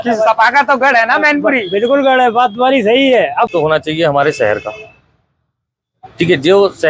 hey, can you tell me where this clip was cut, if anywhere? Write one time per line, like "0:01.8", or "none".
0:03.5